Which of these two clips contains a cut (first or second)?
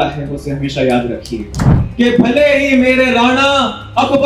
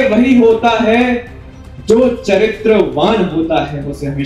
first